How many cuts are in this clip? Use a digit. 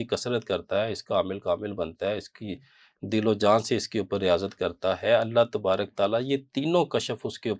0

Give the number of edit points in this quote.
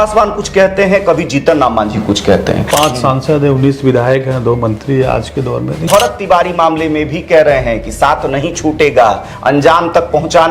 2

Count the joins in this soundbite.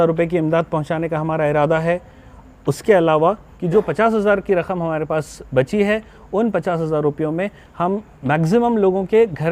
1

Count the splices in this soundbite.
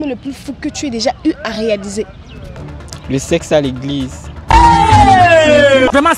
0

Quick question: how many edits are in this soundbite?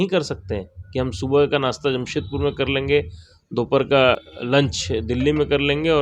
1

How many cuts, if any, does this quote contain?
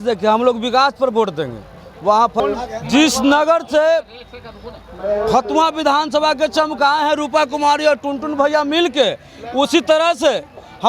1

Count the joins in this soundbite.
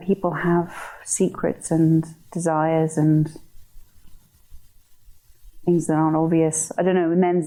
0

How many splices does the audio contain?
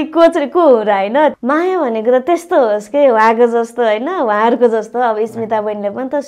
1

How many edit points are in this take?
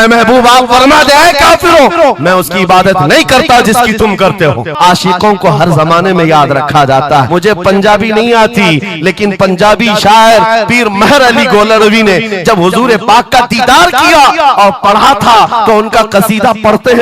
2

